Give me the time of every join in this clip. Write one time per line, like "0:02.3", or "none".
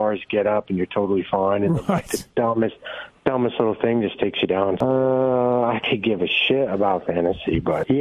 none

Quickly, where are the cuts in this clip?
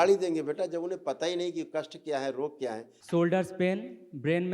0:02.9

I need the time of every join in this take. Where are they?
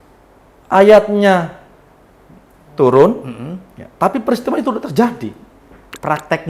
none

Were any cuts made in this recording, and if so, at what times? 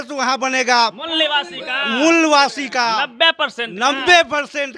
none

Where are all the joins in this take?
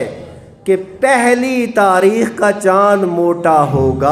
none

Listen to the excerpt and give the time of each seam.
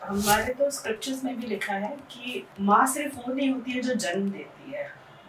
0:02.5

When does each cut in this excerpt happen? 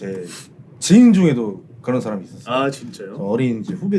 none

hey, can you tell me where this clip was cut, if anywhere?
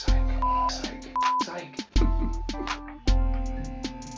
none

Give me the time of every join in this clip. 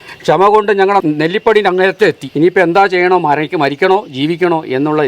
0:01.0
0:02.2

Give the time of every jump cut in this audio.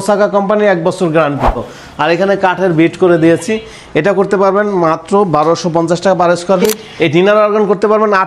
0:01.8
0:06.8

